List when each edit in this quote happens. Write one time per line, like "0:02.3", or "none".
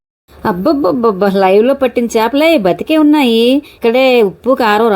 0:03.7